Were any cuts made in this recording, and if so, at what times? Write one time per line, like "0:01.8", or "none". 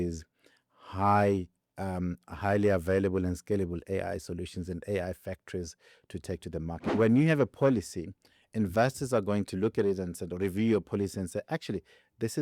0:06.8